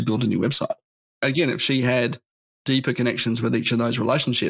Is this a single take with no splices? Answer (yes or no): no